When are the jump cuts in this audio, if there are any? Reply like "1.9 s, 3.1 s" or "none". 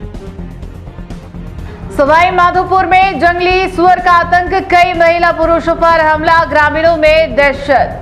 1.6 s